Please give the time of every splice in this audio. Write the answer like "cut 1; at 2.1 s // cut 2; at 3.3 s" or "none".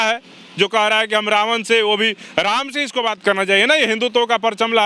none